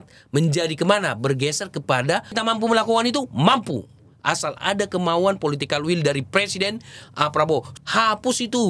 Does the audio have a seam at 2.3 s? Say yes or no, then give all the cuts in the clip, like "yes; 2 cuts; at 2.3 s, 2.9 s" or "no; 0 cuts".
yes; 2 cuts; at 2.3 s, 7.8 s